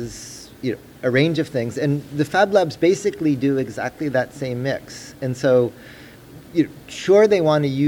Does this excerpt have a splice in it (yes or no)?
no